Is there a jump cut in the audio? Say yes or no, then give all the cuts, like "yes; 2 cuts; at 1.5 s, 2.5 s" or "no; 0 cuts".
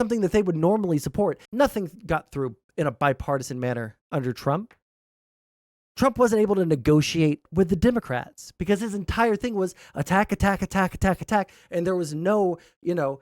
yes; 2 cuts; at 1.4 s, 7.5 s